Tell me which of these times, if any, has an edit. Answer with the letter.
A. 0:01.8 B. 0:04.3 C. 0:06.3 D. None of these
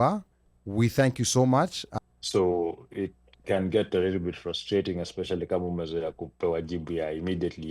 A